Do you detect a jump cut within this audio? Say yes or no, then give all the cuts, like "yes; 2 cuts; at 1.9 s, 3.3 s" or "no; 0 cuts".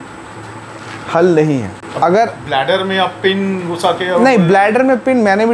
yes; 1 cut; at 1.8 s